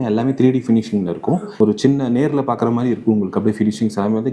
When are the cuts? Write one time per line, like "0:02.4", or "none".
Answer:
0:01.5